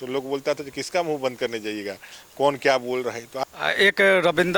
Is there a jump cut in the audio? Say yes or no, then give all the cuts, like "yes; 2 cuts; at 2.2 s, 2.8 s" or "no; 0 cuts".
yes; 1 cut; at 3.3 s